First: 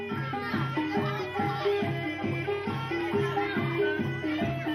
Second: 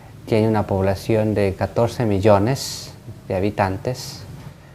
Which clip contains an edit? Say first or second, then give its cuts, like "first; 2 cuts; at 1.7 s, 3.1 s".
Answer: second; 1 cut; at 1.0 s